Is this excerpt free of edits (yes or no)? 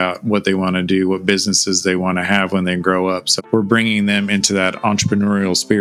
yes